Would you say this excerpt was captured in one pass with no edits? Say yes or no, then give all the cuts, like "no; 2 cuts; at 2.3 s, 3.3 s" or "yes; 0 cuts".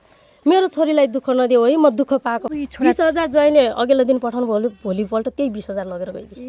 no; 1 cut; at 2.4 s